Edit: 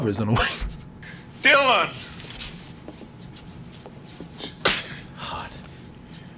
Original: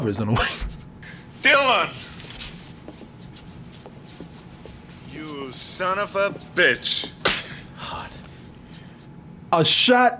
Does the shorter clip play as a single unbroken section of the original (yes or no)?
no